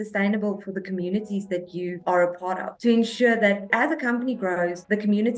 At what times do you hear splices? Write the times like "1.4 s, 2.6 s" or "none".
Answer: 3.7 s